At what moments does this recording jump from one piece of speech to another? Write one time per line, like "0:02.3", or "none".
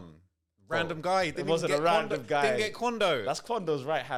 none